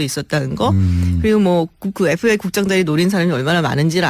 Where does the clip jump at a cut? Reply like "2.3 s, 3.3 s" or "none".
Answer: 2.9 s